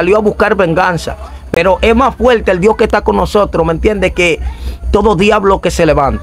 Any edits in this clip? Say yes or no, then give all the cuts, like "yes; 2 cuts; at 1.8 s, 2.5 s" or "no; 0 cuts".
no; 0 cuts